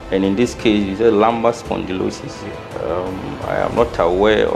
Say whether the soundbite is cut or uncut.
cut